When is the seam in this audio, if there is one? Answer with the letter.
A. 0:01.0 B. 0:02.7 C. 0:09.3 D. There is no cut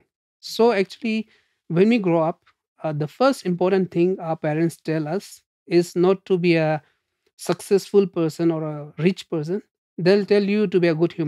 D